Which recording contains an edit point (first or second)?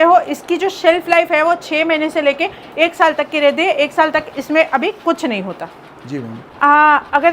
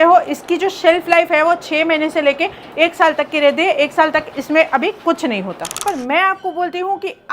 second